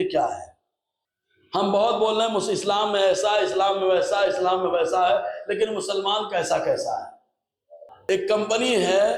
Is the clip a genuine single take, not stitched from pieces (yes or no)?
no